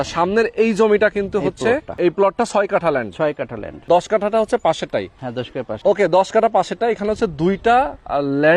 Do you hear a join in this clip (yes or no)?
yes